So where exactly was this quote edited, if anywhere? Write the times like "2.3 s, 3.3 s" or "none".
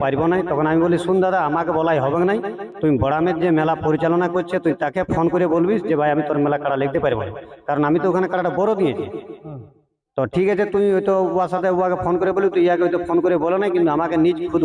none

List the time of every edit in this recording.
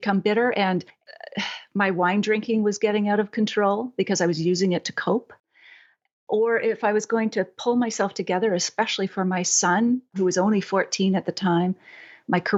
none

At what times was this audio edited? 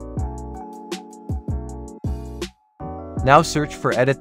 3.2 s

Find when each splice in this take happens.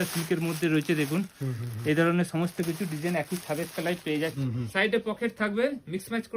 4.4 s

